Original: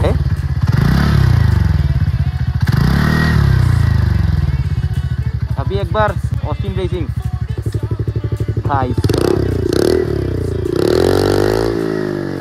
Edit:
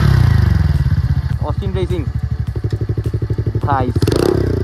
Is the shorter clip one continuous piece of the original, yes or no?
no